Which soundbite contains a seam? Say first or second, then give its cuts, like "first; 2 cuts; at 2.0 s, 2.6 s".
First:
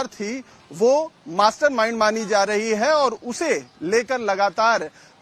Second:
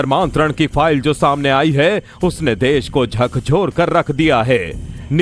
second; 1 cut; at 2.1 s